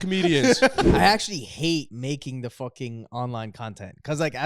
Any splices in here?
yes; 2 cuts; at 0.9 s, 1.9 s

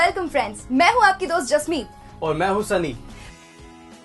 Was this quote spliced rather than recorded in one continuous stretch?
yes; 1 cut; at 3.0 s

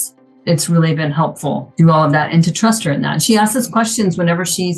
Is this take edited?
no; 0 cuts

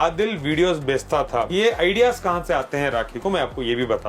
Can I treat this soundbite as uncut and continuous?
no; 1 cut; at 1.5 s

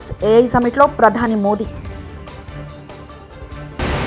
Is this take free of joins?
yes; 0 cuts

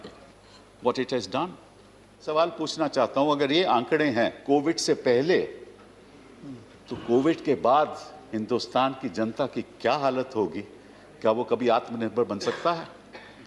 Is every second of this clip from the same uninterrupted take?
no; 1 cut; at 2.3 s

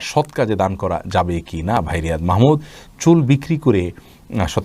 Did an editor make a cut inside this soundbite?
no; 0 cuts

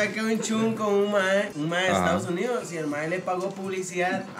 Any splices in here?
no; 0 cuts

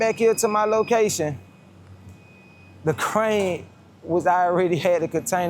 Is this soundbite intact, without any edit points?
yes; 0 cuts

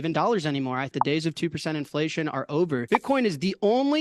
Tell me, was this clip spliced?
yes; 2 cuts; at 0.9 s, 2.8 s

